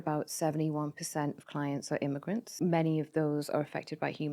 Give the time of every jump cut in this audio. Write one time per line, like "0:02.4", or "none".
0:02.5